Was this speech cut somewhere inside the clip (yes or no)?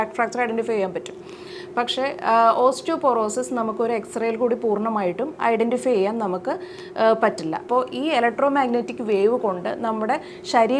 yes